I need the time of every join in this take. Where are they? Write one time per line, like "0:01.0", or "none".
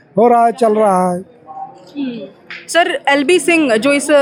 none